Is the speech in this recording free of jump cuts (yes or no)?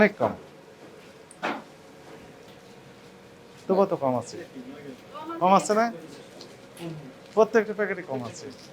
no